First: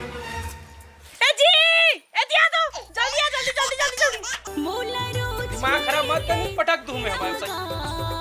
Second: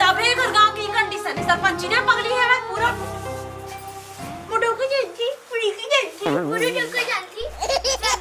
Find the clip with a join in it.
first; 1 cut; at 4.4 s

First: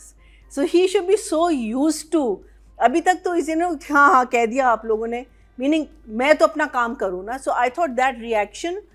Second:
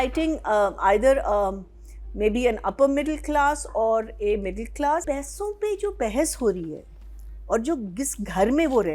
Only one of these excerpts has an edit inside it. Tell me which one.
second; 1 cut; at 5.0 s

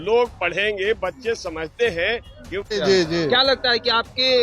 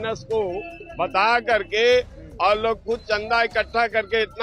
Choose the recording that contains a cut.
first; 1 cut; at 2.7 s

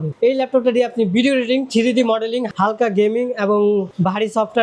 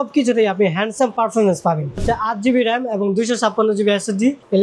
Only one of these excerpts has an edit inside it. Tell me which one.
second; 1 cut; at 2.0 s

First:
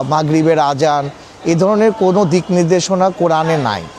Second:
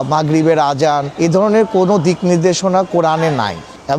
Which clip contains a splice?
second; 1 cut; at 1.1 s

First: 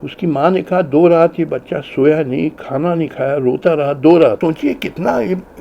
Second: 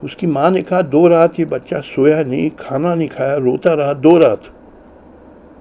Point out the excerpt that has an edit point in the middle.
first; 1 cut; at 4.4 s

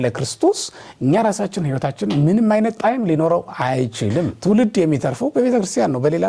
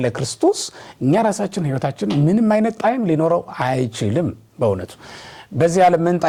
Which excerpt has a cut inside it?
first; 1 cut; at 4.3 s

